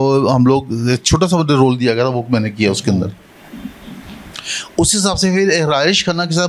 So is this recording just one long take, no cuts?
yes; 0 cuts

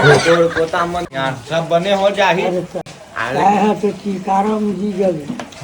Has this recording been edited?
yes; 1 cut; at 1.0 s

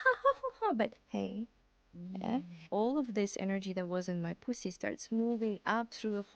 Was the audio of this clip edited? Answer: yes; 1 cut; at 2.6 s

